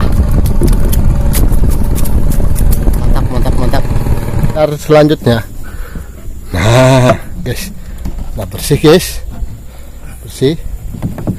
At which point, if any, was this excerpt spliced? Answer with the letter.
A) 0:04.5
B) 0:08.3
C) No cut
A